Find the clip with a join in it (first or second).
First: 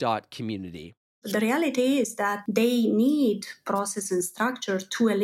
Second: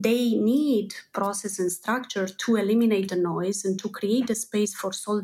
first